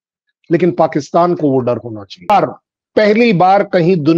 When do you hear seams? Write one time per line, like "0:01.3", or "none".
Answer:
0:02.3